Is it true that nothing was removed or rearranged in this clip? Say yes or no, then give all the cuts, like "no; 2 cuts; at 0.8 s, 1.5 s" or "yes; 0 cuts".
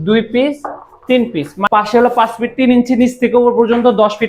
no; 1 cut; at 1.6 s